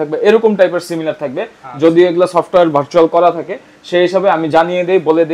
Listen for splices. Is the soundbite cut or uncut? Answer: uncut